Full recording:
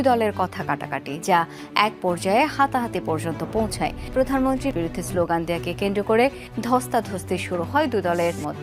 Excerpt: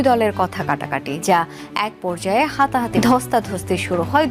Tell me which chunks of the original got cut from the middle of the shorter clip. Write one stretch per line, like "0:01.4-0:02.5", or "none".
0:02.9-0:06.5